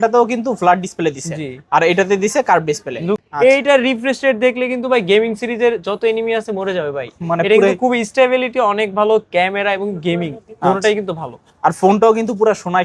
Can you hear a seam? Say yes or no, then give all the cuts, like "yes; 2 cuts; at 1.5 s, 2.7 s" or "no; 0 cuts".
yes; 1 cut; at 3.2 s